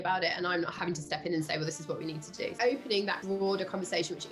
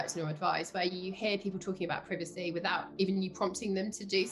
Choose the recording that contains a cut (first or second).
first